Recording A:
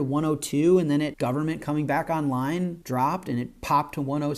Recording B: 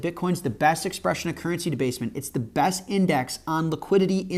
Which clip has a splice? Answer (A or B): A